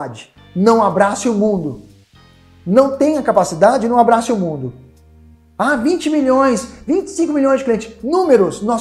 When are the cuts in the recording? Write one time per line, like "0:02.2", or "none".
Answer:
none